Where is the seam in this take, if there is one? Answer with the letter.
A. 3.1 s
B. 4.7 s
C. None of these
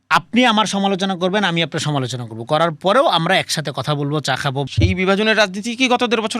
B